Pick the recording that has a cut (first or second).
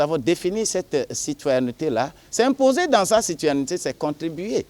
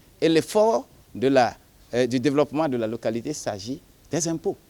first